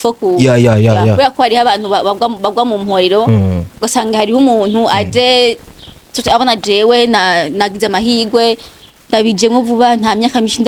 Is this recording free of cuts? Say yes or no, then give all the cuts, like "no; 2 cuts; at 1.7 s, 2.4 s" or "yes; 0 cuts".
yes; 0 cuts